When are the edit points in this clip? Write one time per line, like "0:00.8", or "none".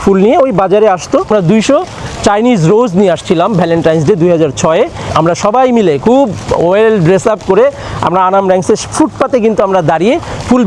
0:01.3
0:05.0